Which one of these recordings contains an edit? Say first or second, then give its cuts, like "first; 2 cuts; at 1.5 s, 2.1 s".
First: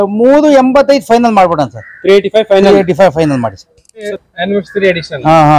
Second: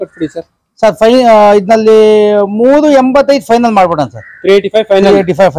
first; 1 cut; at 4.1 s